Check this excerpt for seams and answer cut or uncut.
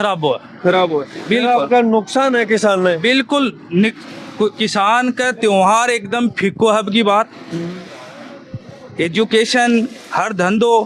uncut